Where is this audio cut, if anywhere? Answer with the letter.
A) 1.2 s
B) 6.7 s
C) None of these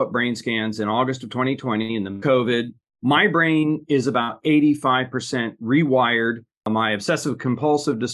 B